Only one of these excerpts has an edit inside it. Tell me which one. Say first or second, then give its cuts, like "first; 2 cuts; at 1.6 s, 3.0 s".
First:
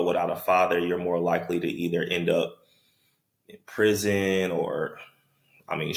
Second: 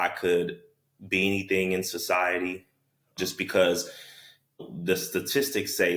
second; 1 cut; at 3.1 s